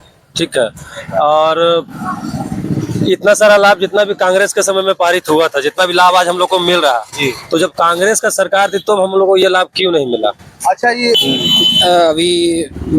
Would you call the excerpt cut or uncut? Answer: cut